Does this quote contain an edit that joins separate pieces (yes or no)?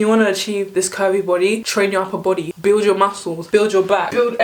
yes